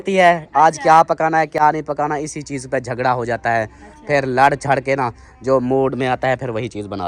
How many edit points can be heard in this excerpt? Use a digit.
0